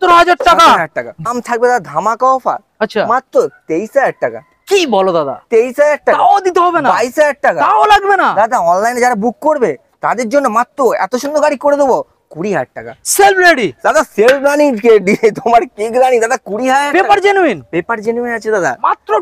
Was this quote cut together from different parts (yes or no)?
yes